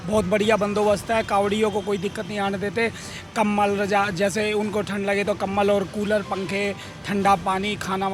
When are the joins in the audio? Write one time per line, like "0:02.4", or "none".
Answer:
none